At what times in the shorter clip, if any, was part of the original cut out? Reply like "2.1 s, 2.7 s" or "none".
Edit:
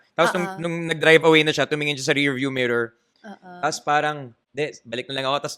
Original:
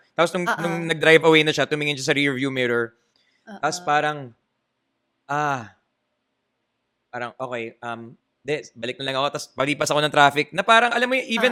4.4 s